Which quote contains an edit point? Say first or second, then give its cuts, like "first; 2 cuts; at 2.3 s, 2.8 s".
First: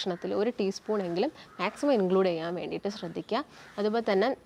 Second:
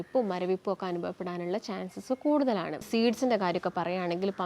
second; 1 cut; at 2.9 s